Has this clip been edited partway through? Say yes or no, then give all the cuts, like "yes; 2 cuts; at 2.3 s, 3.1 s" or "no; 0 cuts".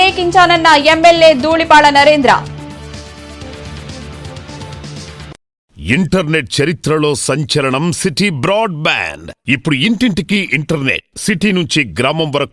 yes; 1 cut; at 5.6 s